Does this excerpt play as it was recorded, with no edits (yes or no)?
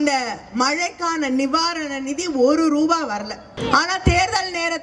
no